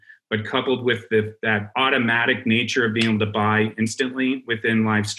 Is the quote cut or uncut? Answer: cut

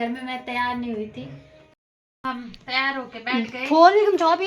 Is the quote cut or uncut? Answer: cut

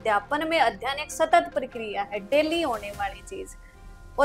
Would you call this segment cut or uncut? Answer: uncut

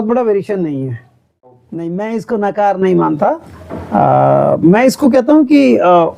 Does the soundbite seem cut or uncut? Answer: cut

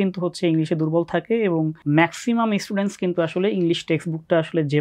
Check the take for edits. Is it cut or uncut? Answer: cut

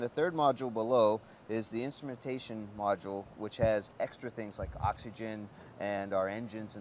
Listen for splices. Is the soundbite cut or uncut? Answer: cut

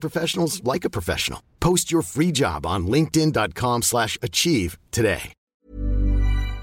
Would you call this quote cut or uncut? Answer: cut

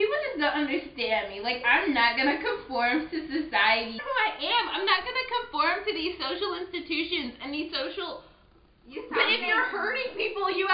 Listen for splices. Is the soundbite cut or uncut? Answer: cut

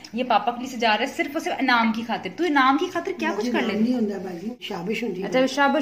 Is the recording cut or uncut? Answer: cut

